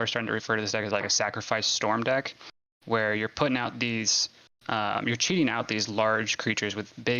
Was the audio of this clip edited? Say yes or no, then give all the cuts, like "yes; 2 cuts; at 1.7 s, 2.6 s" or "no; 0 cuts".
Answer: no; 0 cuts